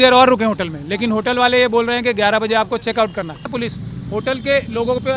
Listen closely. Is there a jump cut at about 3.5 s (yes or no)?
yes